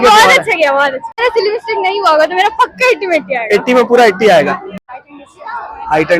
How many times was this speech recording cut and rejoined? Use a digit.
2